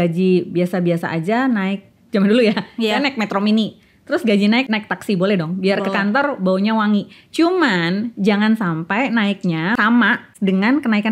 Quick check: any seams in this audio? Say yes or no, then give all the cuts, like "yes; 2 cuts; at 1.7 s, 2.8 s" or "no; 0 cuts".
yes; 2 cuts; at 4.6 s, 9.8 s